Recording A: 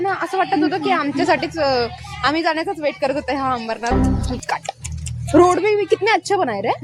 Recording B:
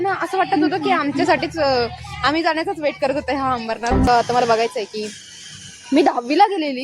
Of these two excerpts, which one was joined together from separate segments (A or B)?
B